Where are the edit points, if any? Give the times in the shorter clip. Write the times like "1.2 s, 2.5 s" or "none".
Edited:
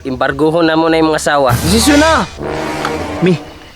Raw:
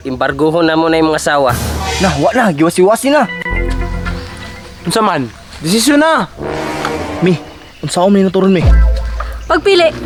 1.6 s